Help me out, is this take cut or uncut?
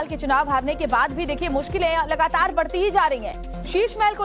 cut